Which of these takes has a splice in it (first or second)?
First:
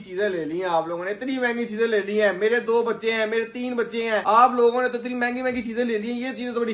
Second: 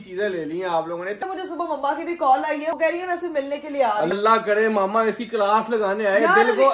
second